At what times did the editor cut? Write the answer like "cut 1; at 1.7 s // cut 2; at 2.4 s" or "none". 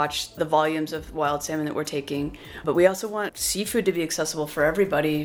none